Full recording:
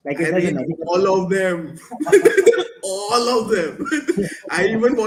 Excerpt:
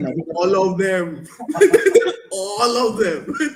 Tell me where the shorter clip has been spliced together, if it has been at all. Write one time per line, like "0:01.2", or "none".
none

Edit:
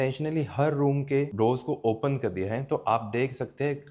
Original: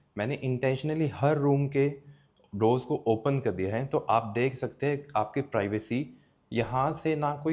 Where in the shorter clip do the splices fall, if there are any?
0:01.3

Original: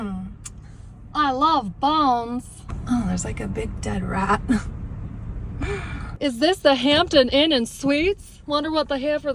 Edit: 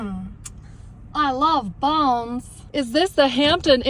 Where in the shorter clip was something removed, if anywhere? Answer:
0:02.5

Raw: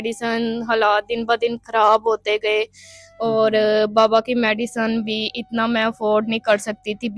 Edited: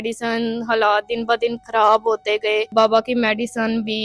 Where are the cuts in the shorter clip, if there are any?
0:02.7

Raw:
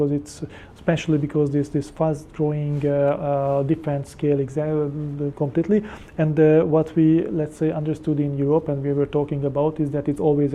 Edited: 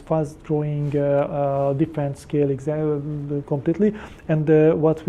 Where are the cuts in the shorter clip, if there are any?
none

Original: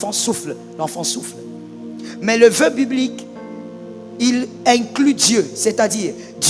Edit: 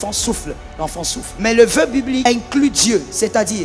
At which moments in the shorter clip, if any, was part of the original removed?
0:01.4
0:02.2

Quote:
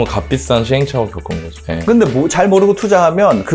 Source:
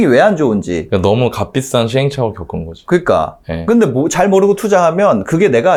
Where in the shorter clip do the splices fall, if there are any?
0:01.5

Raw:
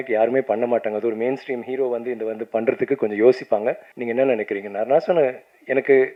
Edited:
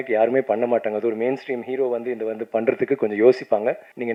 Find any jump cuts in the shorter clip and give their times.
none

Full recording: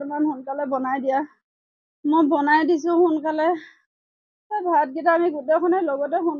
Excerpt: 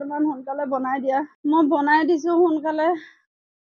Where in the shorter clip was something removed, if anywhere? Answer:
0:01.3

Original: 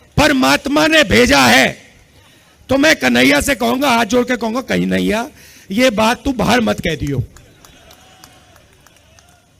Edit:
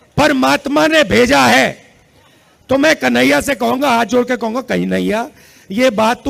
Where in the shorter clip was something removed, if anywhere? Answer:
none

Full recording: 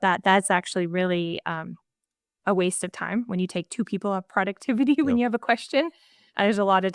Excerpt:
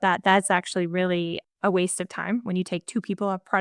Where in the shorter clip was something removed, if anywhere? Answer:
0:01.4

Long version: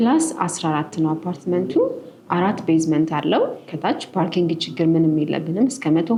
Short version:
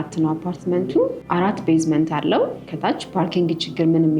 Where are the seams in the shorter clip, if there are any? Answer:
0:01.2

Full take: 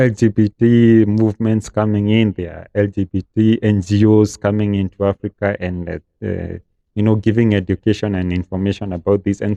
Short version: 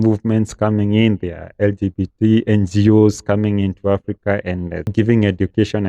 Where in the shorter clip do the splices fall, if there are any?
0:04.9

